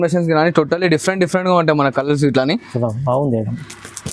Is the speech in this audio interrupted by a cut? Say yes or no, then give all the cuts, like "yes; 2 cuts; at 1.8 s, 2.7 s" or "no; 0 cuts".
no; 0 cuts